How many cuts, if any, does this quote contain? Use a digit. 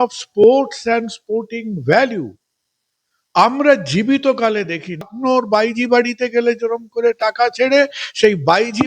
1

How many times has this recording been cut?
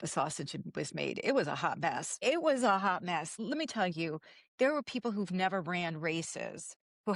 2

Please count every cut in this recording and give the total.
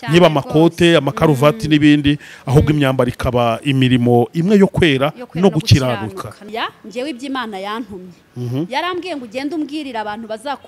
1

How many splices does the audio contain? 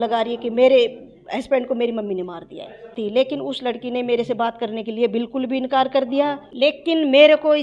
2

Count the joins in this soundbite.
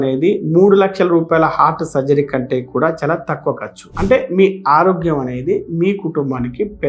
1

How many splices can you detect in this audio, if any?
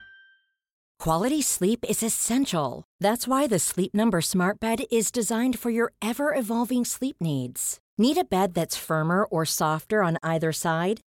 1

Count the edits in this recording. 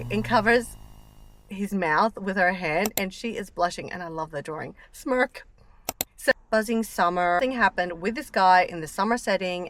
2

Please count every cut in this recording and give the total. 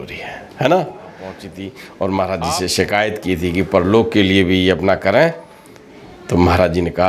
1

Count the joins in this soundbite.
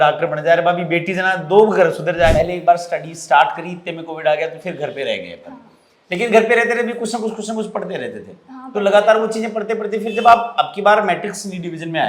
1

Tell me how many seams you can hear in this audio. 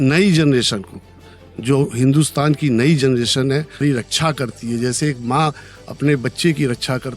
1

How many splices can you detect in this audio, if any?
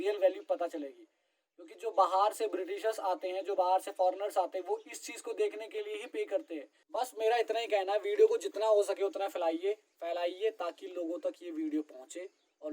1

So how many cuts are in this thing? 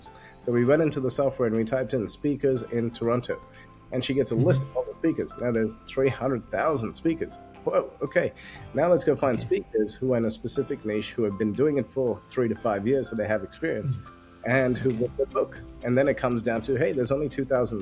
0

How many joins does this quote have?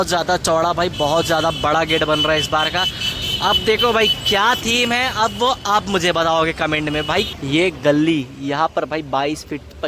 1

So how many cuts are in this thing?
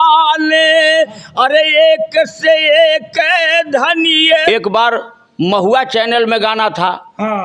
1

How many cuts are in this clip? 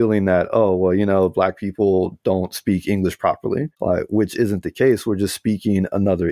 1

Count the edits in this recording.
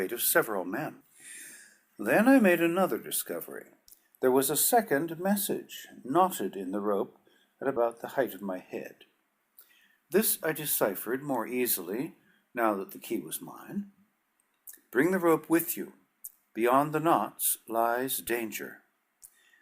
1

